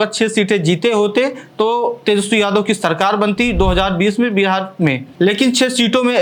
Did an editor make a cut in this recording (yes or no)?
no